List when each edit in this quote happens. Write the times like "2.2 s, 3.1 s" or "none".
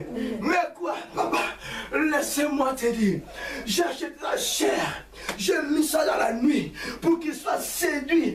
none